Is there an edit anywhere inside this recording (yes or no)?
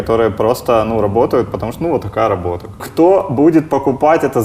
yes